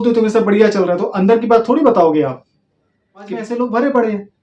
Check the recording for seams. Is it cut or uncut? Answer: cut